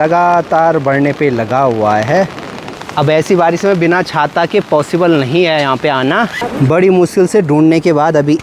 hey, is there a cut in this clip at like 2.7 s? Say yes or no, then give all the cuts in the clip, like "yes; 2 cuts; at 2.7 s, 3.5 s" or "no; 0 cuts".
yes; 2 cuts; at 2.7 s, 6.4 s